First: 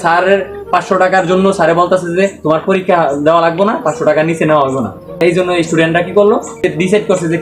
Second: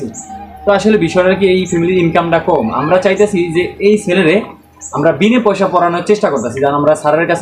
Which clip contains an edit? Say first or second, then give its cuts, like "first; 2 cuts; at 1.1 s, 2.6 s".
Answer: first; 2 cuts; at 5.2 s, 6.6 s